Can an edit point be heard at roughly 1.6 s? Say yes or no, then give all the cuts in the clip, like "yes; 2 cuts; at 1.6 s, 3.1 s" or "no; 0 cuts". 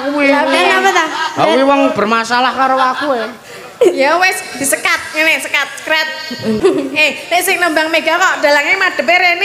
no; 1 cut; at 6.6 s